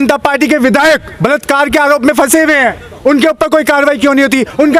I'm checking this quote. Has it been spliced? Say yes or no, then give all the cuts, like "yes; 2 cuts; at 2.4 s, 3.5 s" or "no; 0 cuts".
no; 0 cuts